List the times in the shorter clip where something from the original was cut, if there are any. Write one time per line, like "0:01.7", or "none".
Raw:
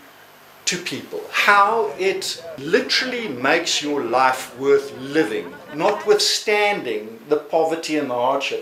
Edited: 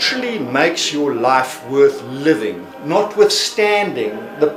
none